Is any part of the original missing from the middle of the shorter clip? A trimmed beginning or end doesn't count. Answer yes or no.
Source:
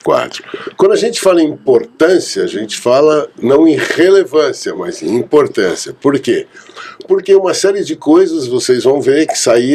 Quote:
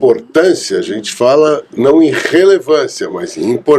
no